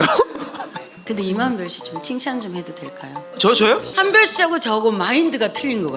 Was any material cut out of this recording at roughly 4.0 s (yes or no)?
yes